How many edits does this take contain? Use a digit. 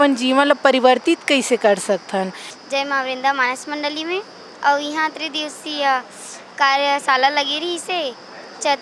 1